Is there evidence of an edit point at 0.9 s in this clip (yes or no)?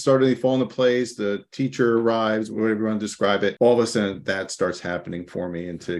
no